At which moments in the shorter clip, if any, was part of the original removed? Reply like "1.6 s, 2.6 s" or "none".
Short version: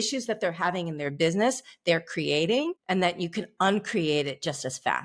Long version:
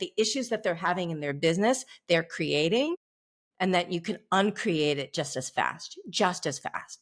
2.8 s

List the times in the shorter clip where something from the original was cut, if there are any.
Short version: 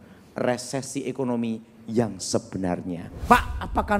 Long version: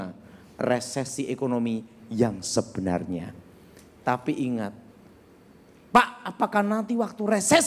3.1 s

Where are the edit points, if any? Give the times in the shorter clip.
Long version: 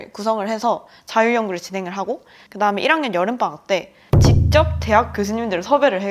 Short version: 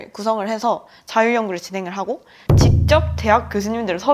2.3 s

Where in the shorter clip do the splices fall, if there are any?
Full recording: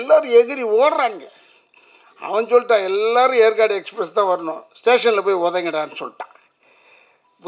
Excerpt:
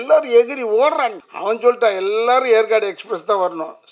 1.3 s

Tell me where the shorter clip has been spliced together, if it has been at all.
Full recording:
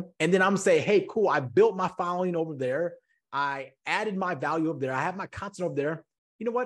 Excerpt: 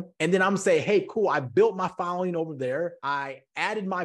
3.0 s

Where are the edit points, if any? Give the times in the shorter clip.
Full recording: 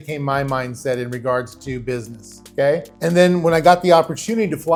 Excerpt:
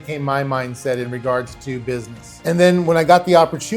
2.3 s

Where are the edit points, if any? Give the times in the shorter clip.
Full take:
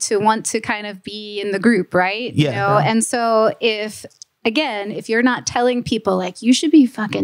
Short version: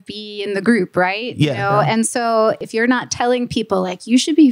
2.6 s

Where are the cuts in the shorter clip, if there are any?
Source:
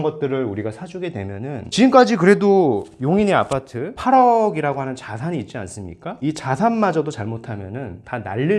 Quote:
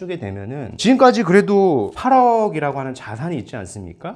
1.9 s

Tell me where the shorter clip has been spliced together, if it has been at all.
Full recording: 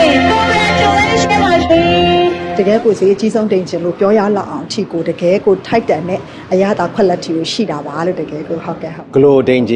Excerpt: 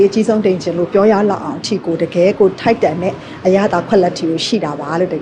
none

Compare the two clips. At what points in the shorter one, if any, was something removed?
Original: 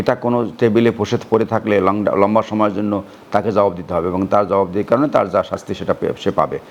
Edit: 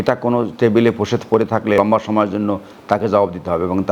1.8 s

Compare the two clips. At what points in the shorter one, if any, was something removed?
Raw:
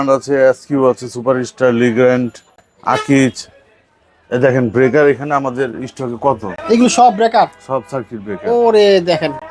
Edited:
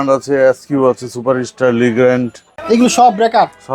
2.5 s

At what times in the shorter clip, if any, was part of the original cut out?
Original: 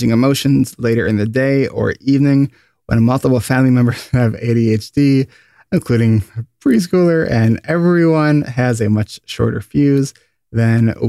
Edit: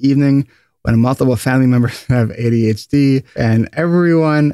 3.4 s

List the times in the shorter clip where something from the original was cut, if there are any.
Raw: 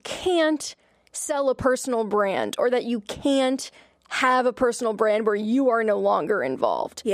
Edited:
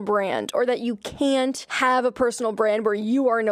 1.7 s

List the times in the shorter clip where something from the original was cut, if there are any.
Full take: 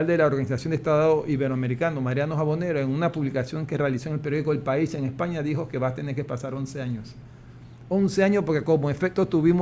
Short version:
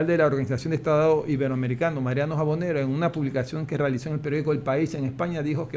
none

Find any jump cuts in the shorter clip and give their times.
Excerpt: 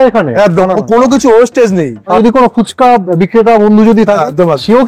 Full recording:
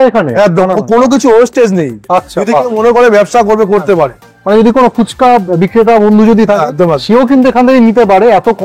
2.2 s

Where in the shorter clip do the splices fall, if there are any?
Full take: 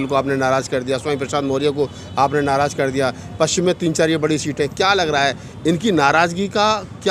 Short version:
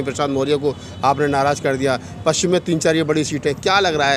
none

